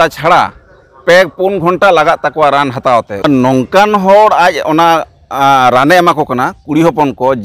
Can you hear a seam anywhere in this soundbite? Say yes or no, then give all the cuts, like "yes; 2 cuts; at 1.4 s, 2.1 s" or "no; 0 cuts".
yes; 1 cut; at 3.2 s